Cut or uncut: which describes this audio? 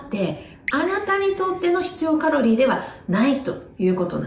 uncut